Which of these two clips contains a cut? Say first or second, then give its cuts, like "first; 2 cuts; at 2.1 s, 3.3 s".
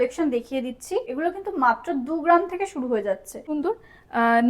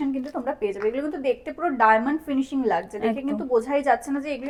first; 2 cuts; at 1.1 s, 3.4 s